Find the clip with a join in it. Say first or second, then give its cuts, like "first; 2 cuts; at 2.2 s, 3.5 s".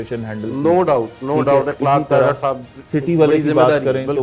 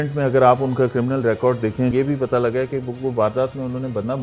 second; 1 cut; at 1.9 s